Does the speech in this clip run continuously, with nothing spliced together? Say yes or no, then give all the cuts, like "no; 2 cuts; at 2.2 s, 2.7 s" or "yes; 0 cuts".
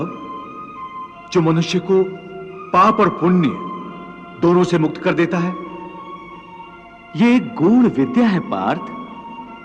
yes; 0 cuts